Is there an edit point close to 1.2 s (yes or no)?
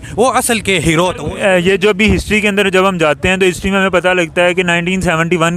yes